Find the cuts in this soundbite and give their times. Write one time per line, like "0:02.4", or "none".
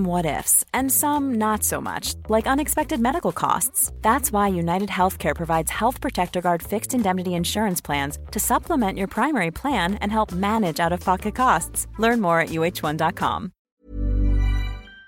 0:13.7